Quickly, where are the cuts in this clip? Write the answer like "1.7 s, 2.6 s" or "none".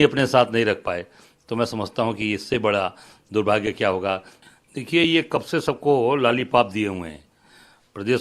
4.4 s